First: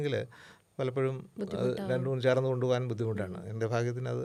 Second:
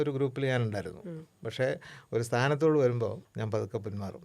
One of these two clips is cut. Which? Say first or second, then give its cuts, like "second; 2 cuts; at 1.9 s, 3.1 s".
second; 1 cut; at 3.3 s